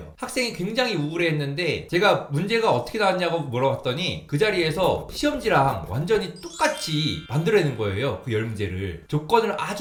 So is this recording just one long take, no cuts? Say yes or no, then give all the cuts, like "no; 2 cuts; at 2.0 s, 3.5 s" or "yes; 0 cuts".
yes; 0 cuts